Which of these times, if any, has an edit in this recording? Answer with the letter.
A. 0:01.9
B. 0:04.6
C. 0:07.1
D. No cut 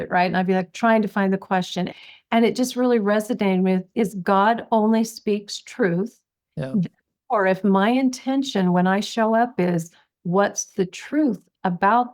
A